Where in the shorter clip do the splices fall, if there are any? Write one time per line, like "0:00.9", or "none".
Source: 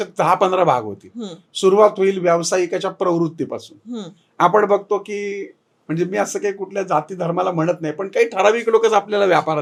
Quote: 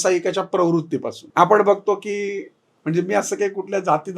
0:01.2